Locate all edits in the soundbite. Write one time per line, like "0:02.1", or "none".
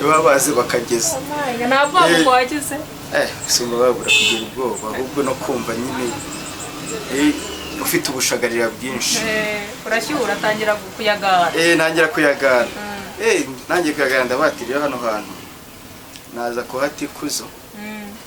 none